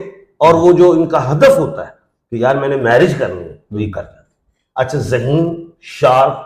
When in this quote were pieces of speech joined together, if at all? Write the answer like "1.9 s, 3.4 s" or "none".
none